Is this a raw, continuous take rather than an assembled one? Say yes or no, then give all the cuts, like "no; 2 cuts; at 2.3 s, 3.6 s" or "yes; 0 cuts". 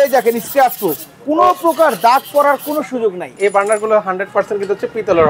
no; 1 cut; at 3.3 s